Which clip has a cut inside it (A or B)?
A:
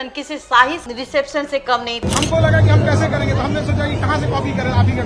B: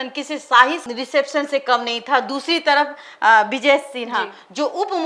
A